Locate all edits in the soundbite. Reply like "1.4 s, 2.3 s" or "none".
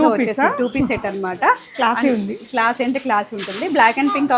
none